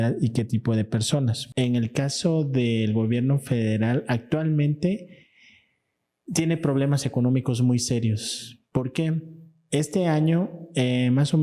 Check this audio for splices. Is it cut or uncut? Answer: cut